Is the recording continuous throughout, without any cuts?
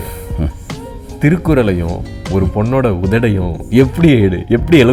yes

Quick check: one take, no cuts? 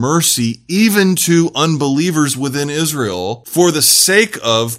no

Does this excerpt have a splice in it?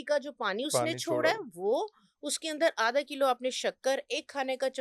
no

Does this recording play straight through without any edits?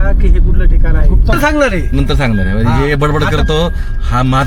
no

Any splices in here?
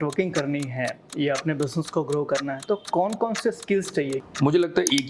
yes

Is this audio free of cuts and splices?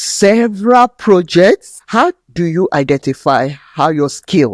no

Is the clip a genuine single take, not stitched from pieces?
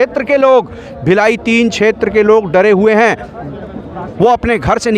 yes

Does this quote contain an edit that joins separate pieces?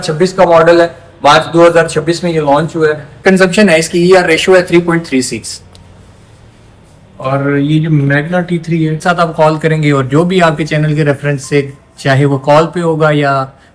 yes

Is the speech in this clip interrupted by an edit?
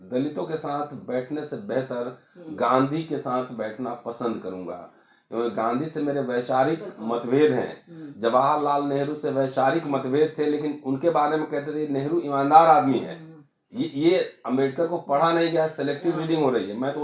no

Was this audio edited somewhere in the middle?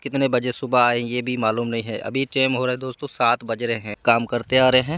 yes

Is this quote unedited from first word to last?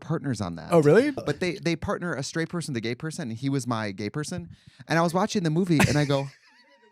no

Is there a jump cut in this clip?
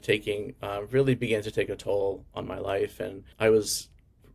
yes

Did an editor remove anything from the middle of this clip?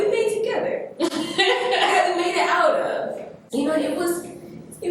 yes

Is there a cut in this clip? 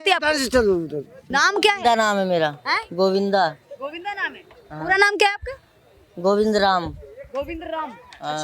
yes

